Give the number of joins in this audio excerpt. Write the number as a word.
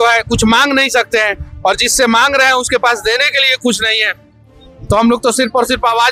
zero